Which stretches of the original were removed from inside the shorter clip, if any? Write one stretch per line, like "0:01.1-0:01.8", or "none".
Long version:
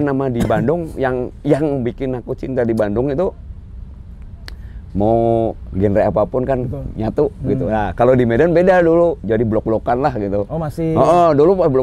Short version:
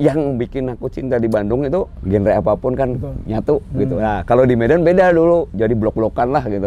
0:03.4-0:05.7

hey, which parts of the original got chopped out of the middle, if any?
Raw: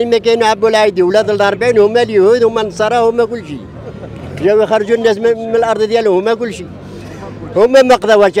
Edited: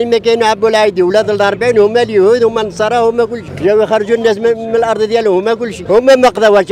0:03.4-0:04.2
0:06.5-0:07.4

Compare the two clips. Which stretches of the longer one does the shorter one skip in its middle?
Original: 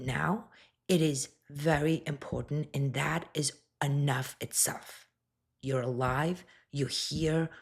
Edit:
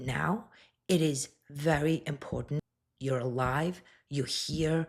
0:02.7-0:05.3

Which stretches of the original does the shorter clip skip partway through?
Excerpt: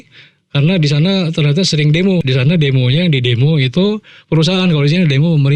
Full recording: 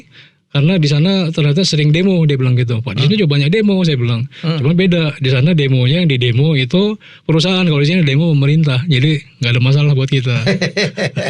0:02.2-0:05.2

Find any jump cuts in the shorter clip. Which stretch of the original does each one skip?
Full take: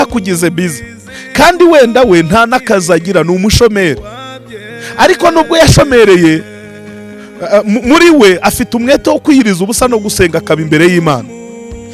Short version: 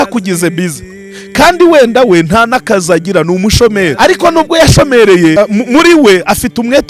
0:03.9-0:04.9
0:06.3-0:07.5

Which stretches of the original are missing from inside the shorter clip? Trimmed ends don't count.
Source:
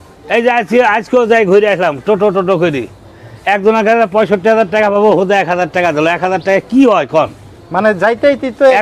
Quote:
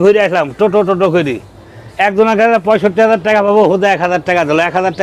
none

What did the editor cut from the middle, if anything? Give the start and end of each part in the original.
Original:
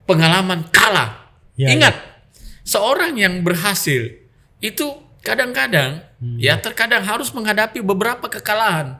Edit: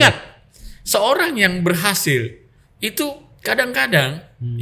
none

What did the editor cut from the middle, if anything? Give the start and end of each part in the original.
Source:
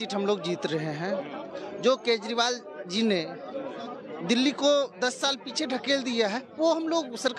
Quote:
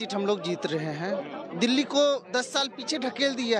0:01.4-0:04.1

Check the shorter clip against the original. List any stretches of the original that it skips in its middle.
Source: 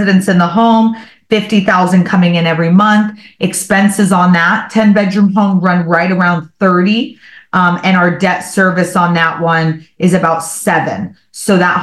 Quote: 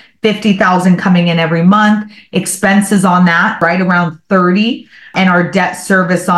0:04.7-0:05.9
0:07.4-0:07.8

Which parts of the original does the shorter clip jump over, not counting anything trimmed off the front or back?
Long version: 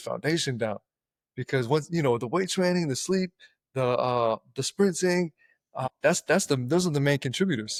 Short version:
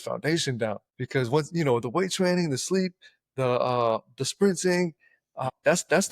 0:00.9-0:01.3

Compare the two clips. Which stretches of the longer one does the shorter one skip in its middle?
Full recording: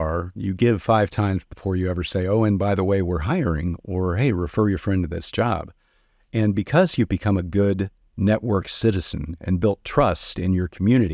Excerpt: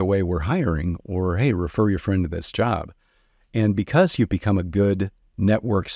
none

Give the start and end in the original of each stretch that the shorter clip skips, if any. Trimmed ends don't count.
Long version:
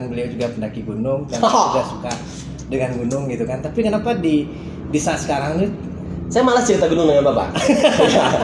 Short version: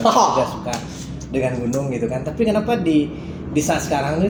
none

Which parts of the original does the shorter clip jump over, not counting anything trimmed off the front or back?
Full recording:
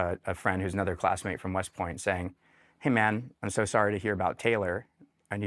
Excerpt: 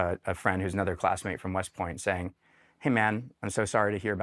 none

